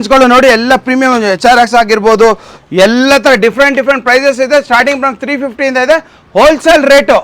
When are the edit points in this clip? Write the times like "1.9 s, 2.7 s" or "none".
none